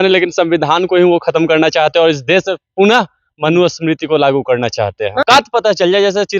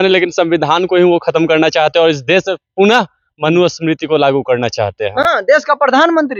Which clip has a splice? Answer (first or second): first